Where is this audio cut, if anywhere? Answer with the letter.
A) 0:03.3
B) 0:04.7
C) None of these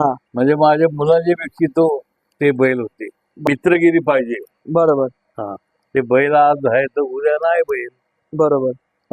A